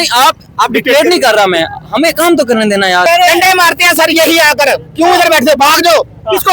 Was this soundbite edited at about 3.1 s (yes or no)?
yes